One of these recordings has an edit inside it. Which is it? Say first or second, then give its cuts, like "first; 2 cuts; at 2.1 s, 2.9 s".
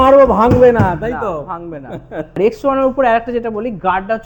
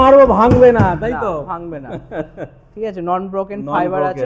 first; 1 cut; at 2.4 s